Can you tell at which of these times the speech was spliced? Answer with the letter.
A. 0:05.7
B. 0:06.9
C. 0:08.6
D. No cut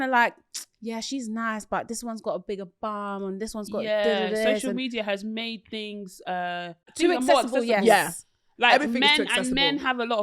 B